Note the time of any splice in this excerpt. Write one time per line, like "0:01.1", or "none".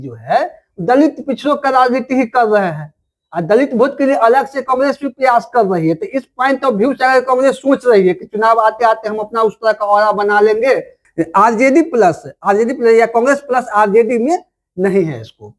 0:11.0